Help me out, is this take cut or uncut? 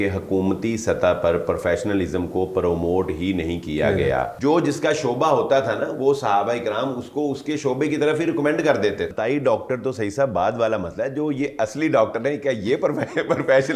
cut